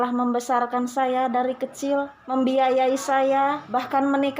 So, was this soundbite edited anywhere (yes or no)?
yes